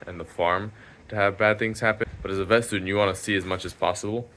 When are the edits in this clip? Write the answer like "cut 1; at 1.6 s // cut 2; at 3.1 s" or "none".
cut 1; at 2.1 s